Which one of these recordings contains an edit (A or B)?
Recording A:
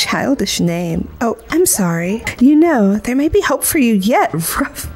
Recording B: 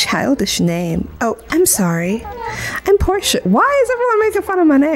A